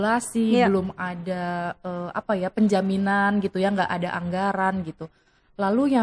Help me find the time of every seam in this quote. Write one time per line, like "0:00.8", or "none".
none

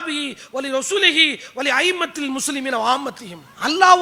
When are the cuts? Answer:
none

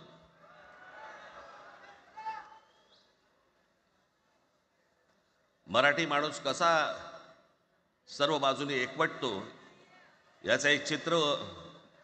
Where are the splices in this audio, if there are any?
none

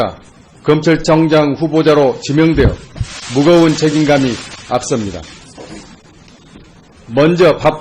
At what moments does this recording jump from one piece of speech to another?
none

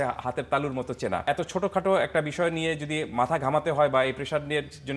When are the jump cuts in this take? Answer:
0:01.2

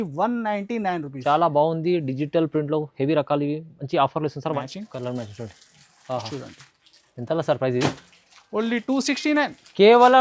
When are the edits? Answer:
0:04.6

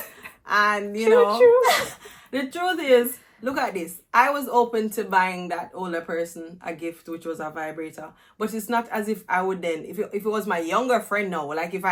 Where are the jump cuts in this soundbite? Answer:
none

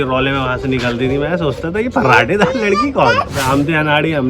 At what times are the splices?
0:03.4

